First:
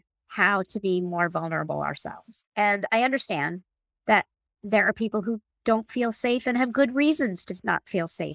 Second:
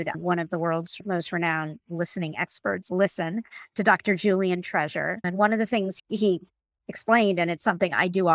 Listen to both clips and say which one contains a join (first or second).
second